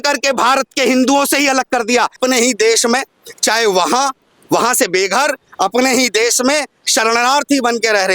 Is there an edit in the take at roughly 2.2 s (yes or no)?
yes